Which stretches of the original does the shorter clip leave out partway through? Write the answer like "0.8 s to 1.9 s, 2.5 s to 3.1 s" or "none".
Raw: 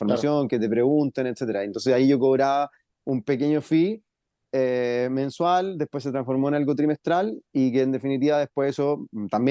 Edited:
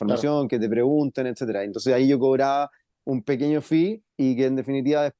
4.0 s to 7.4 s